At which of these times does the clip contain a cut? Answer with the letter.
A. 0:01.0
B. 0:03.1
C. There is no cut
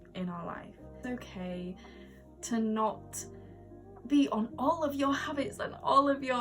A